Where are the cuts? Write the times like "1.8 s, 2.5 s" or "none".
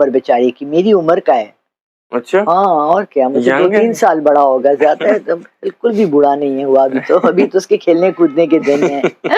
none

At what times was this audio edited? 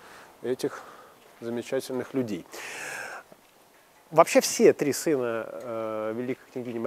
none

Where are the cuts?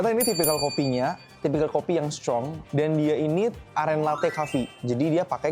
1.3 s, 2.6 s

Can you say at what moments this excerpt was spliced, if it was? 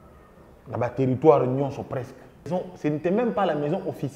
2.5 s

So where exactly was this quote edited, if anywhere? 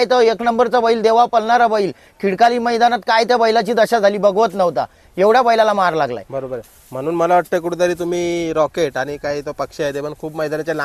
none

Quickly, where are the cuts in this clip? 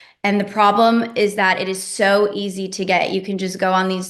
none

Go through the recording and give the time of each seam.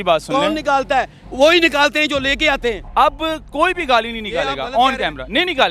2.8 s

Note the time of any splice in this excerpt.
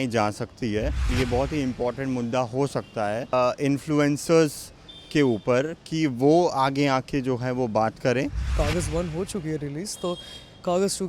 1.1 s, 3.3 s, 8.5 s

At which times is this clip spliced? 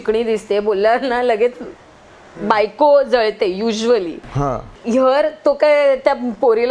4.7 s

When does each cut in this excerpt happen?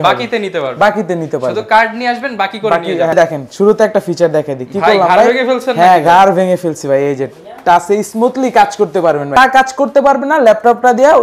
3.1 s, 9.4 s

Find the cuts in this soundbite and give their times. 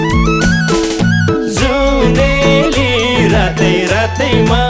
none

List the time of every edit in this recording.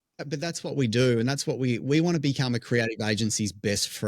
none

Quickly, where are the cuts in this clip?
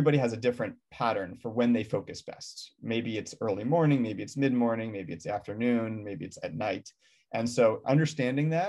none

